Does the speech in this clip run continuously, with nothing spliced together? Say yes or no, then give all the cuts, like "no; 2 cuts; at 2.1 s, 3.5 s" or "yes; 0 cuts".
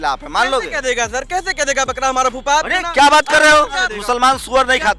no; 1 cut; at 3.9 s